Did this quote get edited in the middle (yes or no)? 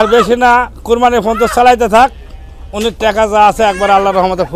no